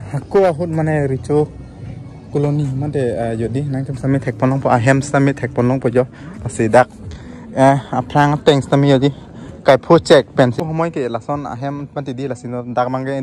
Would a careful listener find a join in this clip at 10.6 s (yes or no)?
yes